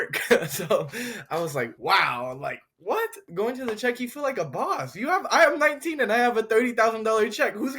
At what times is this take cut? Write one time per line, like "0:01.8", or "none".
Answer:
0:01.8
0:03.3